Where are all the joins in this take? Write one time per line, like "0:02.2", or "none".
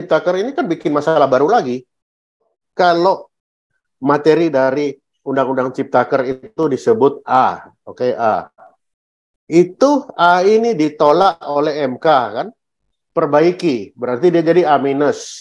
0:02.5